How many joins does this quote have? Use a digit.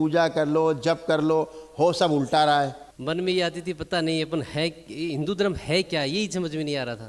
1